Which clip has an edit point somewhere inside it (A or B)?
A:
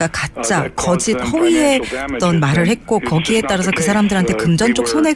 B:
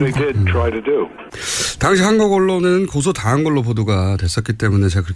A